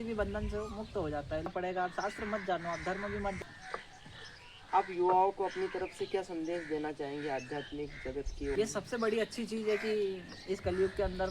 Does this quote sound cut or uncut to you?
cut